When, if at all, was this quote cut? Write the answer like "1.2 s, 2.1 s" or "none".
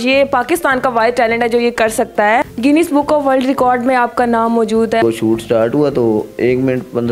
2.5 s, 5.0 s